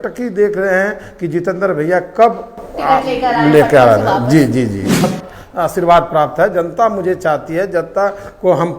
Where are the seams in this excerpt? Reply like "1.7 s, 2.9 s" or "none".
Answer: 5.1 s